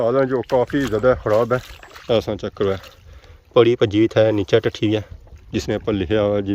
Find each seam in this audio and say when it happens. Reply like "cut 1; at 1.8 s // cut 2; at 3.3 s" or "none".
cut 1; at 1.8 s